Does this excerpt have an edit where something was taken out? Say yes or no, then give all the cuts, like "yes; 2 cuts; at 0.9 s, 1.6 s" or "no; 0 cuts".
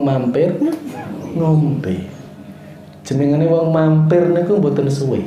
no; 0 cuts